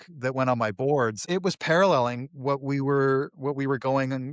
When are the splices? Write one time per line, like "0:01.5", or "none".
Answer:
0:01.2